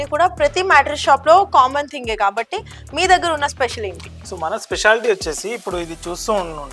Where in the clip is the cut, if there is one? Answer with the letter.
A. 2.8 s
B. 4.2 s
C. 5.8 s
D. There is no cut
D